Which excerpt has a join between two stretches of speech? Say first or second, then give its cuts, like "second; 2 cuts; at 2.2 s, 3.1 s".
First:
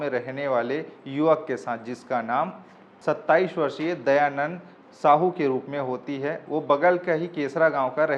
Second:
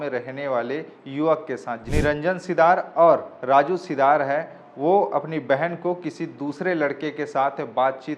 second; 1 cut; at 1.8 s